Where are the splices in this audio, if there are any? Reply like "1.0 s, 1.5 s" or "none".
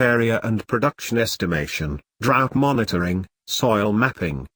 0.9 s